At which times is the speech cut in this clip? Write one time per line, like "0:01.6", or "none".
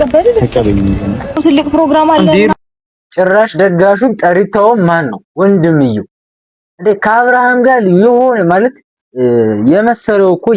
0:01.4